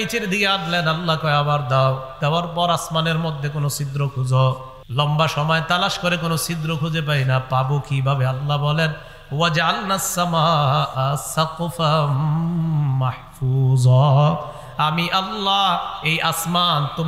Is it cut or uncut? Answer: cut